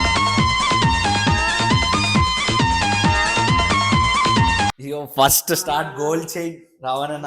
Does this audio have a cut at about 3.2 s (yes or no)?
no